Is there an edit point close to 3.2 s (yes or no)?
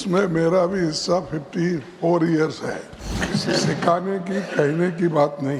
yes